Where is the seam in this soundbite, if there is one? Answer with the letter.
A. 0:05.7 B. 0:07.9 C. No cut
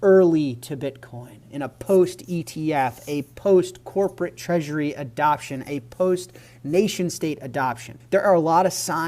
B